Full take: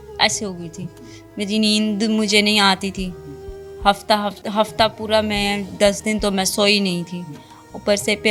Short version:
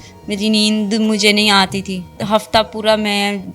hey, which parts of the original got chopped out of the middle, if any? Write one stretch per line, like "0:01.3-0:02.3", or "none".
0:03.2-0:04.4